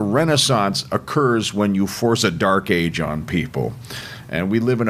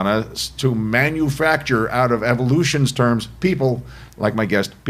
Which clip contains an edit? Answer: second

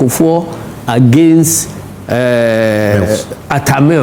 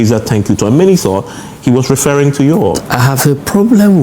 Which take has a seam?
second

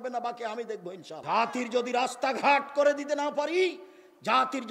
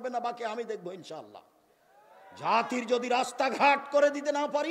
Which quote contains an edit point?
first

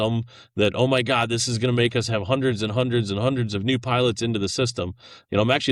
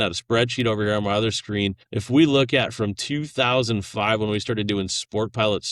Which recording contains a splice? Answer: second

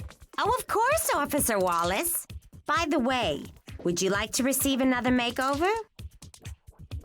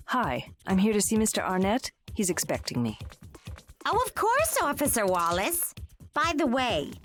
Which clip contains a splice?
first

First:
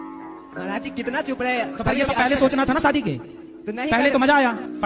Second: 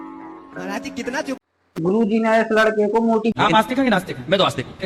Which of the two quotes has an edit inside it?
second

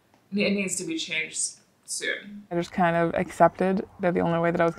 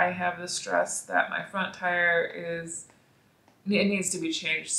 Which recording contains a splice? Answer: first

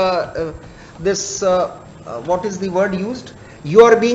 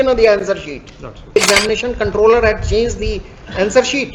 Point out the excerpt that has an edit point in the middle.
second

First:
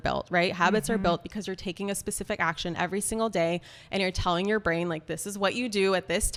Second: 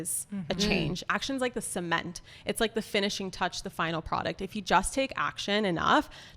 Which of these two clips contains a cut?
second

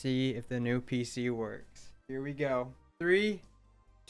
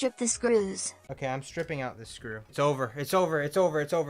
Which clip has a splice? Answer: second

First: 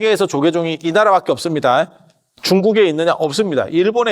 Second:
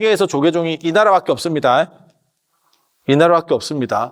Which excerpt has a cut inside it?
first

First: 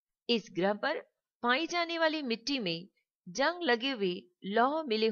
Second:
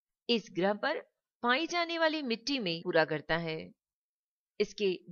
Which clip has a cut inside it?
first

